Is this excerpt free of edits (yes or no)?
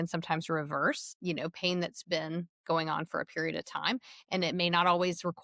yes